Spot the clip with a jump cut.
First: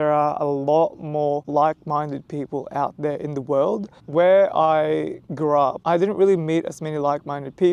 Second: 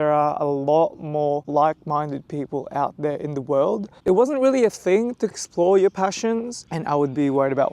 second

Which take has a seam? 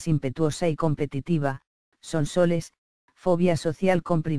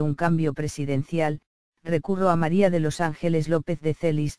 first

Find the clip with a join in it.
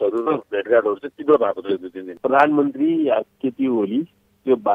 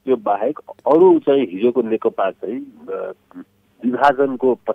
first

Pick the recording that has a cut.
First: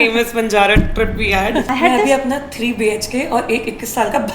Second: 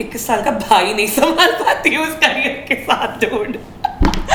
first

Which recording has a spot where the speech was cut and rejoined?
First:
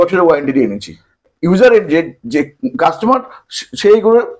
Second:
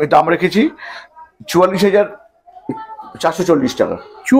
first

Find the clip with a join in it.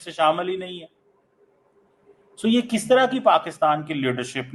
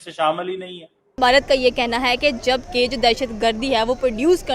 second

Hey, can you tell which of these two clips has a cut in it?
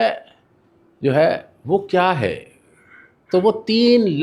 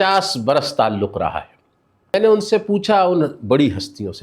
second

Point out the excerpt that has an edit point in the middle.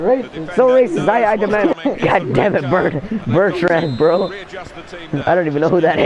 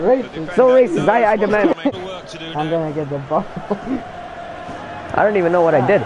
second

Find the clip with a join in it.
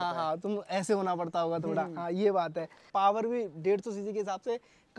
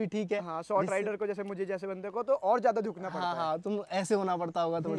first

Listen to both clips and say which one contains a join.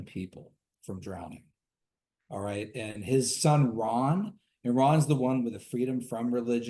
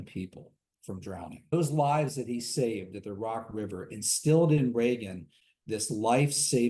second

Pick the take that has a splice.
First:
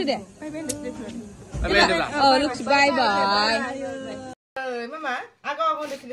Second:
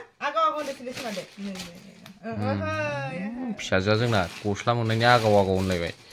first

